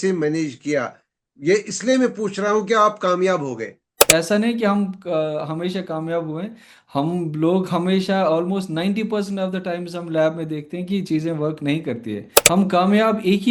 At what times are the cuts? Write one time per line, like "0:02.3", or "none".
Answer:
0:04.0
0:12.3